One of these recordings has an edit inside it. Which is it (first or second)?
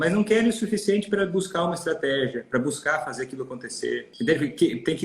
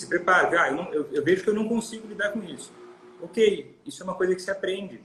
first